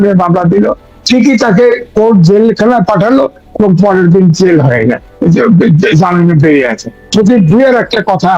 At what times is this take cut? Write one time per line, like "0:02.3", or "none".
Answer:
0:07.1